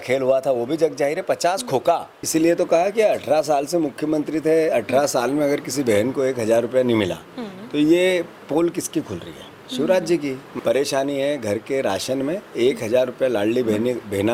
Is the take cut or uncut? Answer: cut